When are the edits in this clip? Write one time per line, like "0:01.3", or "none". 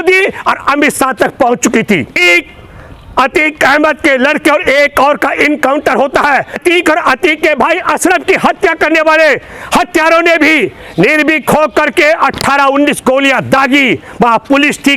0:02.2
0:06.6

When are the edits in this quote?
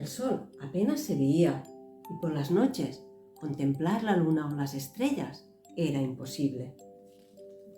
0:06.7

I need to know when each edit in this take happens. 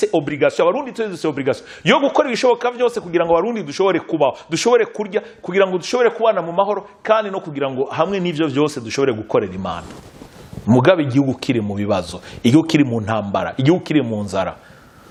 none

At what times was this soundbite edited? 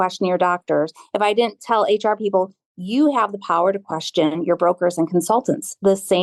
none

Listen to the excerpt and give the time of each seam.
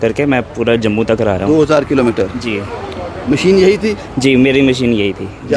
none

